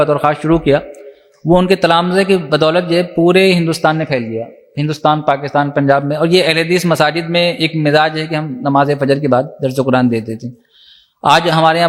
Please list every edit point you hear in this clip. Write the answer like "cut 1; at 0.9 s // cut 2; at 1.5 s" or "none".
none